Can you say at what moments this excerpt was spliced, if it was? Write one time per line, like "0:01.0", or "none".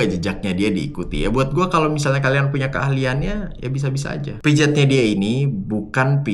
0:04.3